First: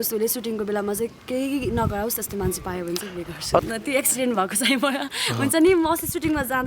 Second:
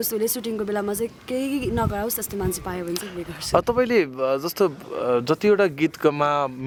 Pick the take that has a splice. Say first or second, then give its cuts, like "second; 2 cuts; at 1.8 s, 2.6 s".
first; 1 cut; at 3.6 s